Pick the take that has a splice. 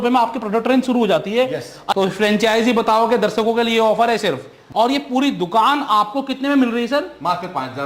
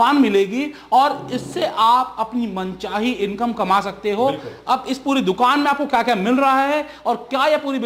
first; 2 cuts; at 1.8 s, 4.5 s

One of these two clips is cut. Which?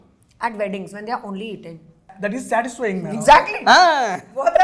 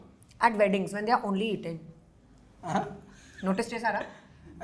first; 1 cut; at 2.1 s

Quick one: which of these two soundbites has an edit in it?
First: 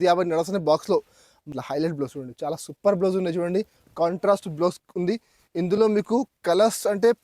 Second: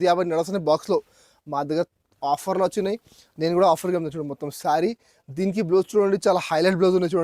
first; 1 cut; at 1.5 s

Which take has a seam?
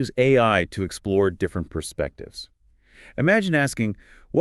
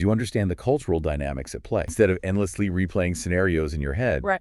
second; 1 cut; at 1.9 s

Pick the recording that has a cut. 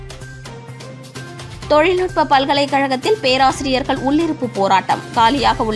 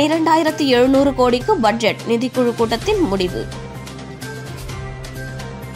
first; 1 cut; at 1.5 s

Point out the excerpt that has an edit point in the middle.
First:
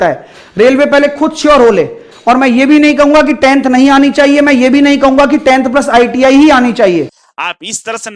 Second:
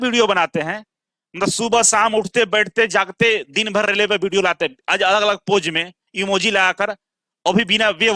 first; 2 cuts; at 2.1 s, 7.2 s

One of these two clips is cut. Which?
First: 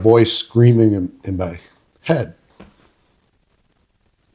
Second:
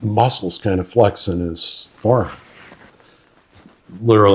second; 1 cut; at 2.9 s

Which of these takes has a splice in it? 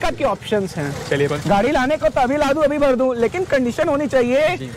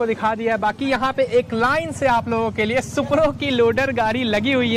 first; 1 cut; at 1.3 s

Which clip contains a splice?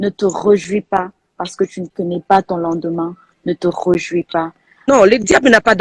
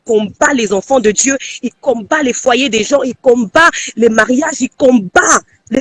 first; 1 cut; at 4.8 s

